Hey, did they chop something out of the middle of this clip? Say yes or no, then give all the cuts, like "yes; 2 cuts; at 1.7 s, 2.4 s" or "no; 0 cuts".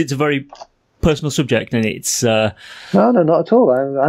no; 0 cuts